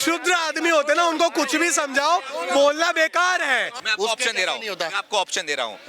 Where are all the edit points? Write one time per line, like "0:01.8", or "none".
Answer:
0:03.7